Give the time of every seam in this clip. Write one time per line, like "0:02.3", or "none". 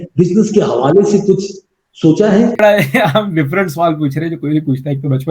0:02.6